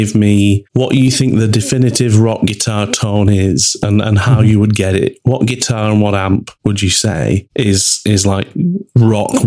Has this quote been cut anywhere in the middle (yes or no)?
no